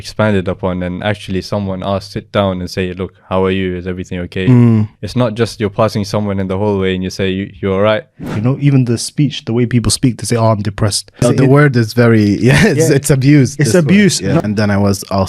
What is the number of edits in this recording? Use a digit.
4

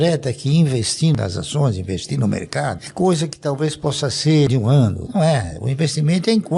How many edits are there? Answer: 2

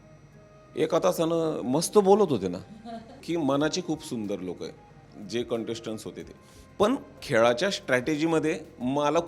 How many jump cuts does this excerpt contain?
1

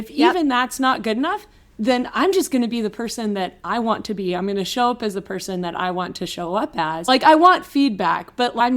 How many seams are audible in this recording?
1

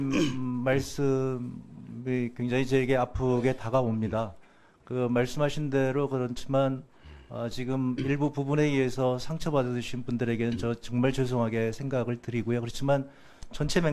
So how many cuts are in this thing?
1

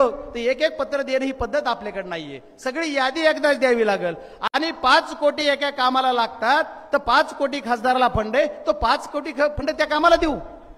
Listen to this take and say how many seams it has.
0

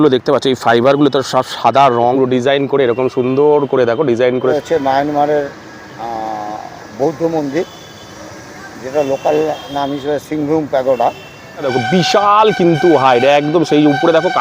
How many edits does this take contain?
3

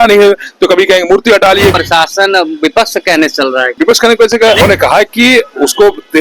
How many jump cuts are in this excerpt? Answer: 3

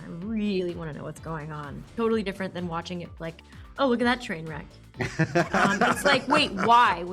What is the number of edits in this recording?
1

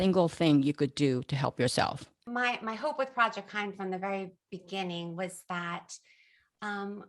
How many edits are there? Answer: 1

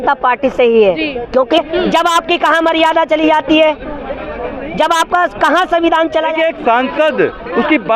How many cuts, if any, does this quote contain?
2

